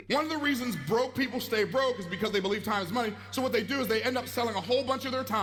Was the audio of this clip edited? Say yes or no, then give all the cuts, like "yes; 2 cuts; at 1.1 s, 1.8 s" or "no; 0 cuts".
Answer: no; 0 cuts